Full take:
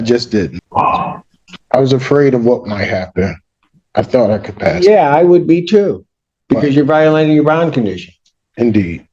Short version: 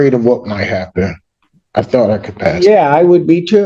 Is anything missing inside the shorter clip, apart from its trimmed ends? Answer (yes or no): no